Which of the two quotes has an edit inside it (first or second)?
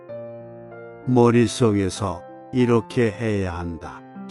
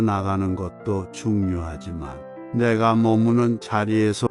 first